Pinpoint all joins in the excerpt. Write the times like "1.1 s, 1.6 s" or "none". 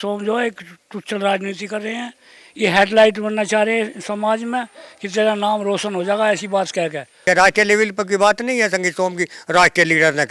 7.1 s